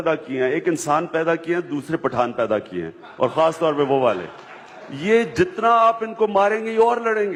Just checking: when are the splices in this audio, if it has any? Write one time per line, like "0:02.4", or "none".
none